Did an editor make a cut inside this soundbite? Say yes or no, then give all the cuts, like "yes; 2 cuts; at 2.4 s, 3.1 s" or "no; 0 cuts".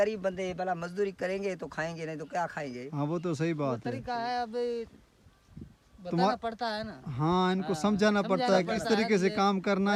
no; 0 cuts